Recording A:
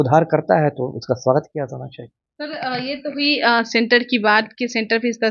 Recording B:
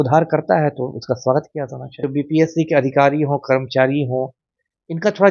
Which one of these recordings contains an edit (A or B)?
B